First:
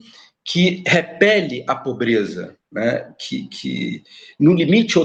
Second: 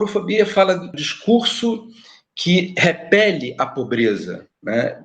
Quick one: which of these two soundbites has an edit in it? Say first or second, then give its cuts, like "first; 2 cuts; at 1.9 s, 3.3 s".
second; 1 cut; at 0.9 s